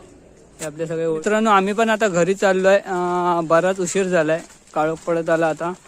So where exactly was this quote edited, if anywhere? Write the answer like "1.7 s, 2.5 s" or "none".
1.2 s